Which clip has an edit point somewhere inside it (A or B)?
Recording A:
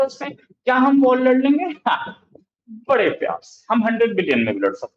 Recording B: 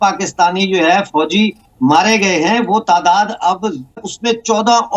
B